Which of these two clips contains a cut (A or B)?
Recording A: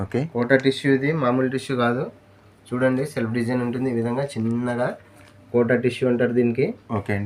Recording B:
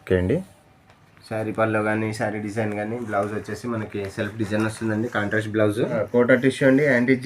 B